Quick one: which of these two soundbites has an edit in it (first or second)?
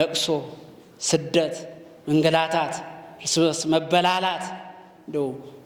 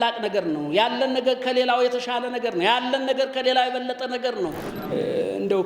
second